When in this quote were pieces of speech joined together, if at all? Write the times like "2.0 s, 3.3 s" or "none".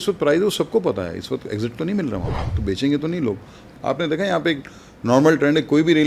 2.4 s, 3.7 s